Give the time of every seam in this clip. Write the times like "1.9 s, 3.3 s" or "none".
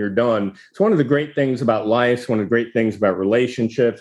none